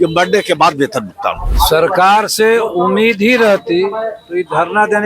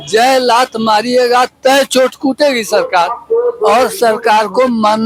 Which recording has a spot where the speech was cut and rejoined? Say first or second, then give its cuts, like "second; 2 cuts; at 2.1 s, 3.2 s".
first; 1 cut; at 1.4 s